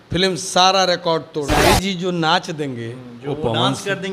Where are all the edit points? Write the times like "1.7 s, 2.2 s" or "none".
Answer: 1.6 s